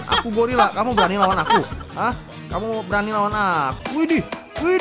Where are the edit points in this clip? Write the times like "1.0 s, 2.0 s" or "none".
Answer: 3.8 s